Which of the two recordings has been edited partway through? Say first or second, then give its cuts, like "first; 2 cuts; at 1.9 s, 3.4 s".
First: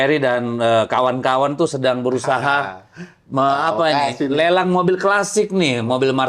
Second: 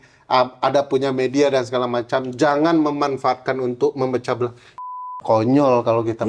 second; 1 cut; at 4.9 s